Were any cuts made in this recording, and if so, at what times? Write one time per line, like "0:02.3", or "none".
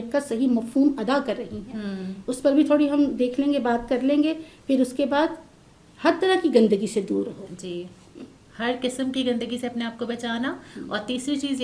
none